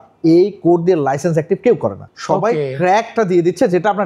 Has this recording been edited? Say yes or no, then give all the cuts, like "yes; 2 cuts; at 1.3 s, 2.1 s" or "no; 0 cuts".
yes; 1 cut; at 2.1 s